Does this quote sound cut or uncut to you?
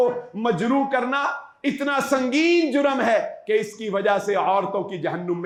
uncut